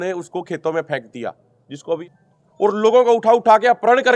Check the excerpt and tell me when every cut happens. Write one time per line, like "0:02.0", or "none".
0:02.0